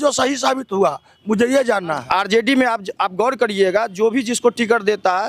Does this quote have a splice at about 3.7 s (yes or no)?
no